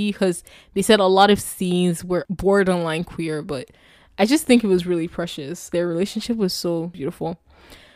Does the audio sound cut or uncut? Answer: cut